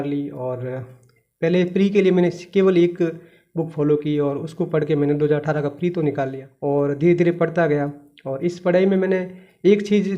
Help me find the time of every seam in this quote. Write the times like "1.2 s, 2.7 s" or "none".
6.4 s